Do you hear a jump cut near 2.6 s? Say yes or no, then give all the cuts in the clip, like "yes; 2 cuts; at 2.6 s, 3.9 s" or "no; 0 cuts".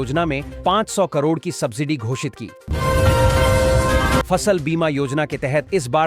yes; 2 cuts; at 2.6 s, 4.3 s